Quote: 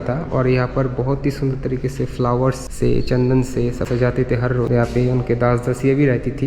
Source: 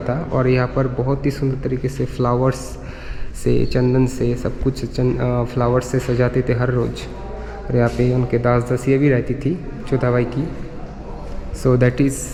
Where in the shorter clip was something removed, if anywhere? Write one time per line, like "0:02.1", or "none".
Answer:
0:02.7
0:03.9
0:04.7